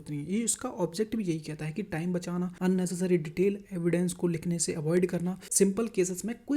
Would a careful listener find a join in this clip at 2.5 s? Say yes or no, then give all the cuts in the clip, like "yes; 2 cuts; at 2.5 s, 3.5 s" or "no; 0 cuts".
yes; 2 cuts; at 2.5 s, 5.4 s